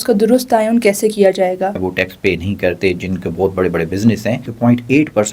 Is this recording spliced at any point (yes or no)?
yes